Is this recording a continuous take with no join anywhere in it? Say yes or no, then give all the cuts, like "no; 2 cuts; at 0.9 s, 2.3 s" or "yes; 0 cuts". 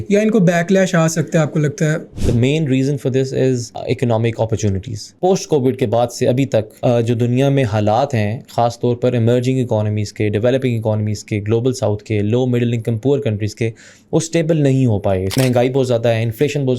no; 5 cuts; at 2.1 s, 3.7 s, 5.1 s, 6.7 s, 15.4 s